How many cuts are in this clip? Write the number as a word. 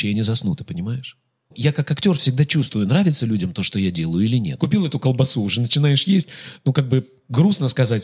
two